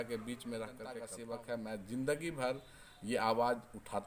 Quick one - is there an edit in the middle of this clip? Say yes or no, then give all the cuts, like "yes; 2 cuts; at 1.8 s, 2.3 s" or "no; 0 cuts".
yes; 1 cut; at 1.2 s